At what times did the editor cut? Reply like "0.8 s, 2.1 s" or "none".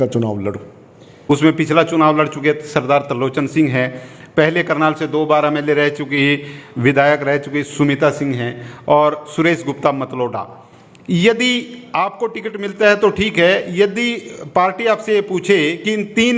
1.1 s